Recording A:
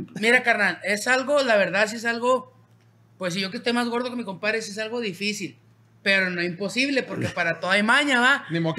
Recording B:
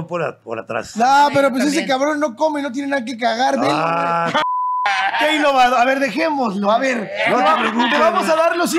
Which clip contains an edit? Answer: B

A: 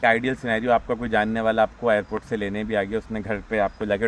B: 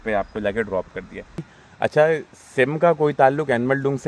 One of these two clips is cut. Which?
B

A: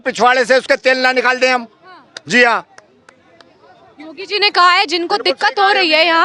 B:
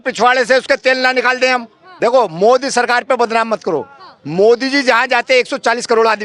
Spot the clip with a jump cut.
B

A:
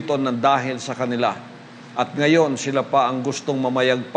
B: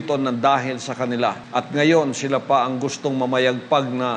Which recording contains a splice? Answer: B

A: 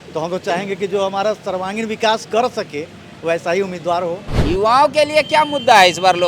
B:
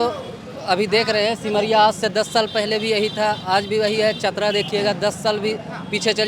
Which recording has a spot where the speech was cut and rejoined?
A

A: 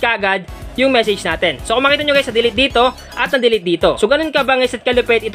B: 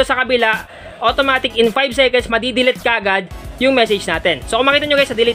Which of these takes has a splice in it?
A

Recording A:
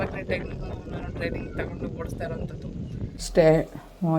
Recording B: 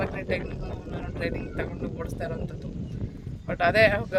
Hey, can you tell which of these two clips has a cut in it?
A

